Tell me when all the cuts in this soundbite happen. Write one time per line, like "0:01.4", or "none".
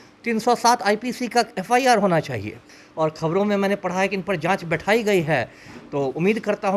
0:02.7